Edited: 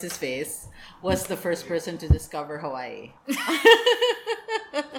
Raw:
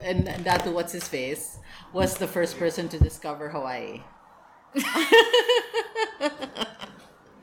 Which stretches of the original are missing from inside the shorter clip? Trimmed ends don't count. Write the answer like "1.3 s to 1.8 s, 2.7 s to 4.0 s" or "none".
4.0 s to 4.5 s